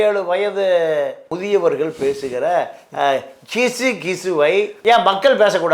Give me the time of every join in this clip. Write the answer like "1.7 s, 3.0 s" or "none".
1.2 s, 4.7 s